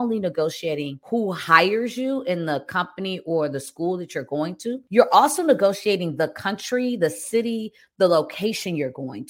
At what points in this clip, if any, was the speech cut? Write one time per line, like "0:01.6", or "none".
0:00.9
0:04.8

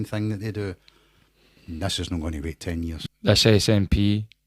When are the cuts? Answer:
0:03.0

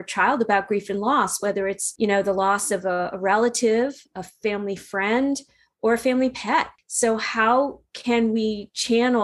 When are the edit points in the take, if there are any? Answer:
0:01.8
0:06.8

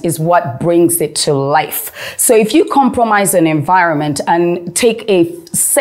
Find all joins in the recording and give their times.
none

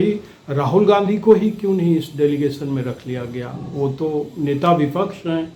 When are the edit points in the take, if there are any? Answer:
none

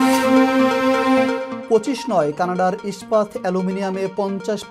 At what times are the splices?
0:01.5

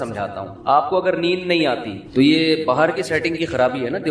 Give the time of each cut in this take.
0:02.0

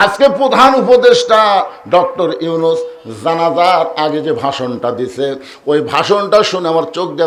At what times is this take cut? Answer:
none

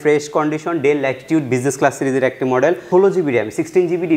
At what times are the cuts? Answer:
0:02.8

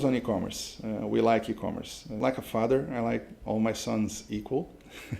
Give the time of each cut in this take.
0:02.1

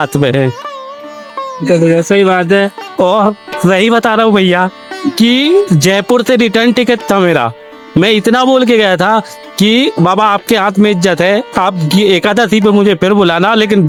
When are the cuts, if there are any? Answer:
none

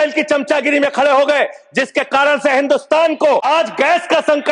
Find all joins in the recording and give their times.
0:03.4

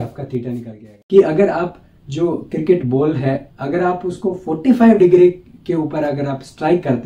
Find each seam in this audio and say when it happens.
0:00.9

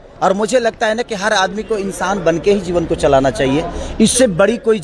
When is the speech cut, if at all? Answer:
none

